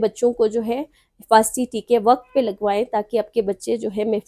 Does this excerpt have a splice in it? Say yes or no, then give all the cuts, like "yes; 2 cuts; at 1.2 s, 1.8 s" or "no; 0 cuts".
no; 0 cuts